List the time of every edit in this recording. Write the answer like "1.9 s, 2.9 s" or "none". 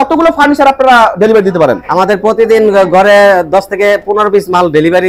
none